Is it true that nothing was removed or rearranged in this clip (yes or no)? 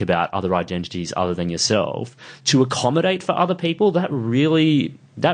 yes